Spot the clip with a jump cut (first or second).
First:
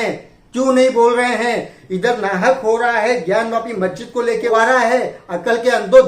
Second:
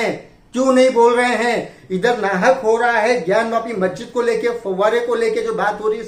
first